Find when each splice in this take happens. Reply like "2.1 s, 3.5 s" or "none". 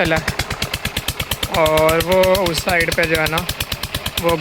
none